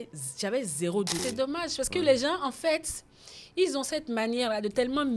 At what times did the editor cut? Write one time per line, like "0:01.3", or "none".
0:01.2